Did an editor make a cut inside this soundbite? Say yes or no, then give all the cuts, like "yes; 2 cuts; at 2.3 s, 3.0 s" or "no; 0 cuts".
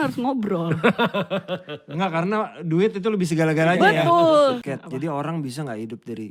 yes; 1 cut; at 4.7 s